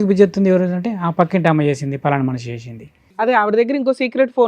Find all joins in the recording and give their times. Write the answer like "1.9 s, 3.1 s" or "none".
3.3 s